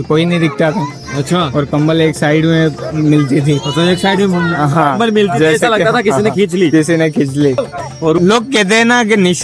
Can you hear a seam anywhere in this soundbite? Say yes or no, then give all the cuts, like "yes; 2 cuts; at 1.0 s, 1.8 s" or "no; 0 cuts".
yes; 1 cut; at 8.2 s